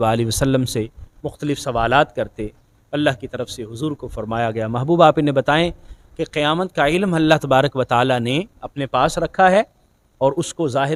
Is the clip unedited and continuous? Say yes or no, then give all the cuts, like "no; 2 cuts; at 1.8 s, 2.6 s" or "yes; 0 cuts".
yes; 0 cuts